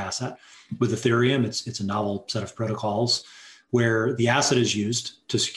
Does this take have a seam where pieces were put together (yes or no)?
no